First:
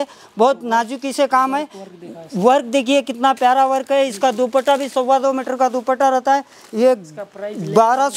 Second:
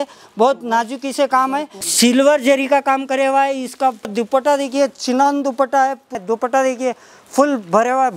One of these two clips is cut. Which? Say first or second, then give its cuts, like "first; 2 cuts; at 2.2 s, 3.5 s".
second; 3 cuts; at 1.8 s, 4.1 s, 6.2 s